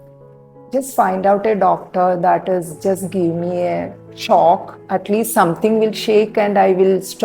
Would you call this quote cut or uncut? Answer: uncut